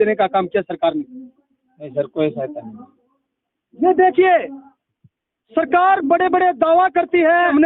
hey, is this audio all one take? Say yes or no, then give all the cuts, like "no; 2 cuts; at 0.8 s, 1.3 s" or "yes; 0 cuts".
yes; 0 cuts